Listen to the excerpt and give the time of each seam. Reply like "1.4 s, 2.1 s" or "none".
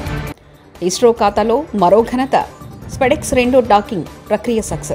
none